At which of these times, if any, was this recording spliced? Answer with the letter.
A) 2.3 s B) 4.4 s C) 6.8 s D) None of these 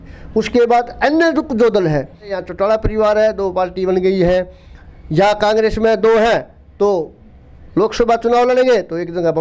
A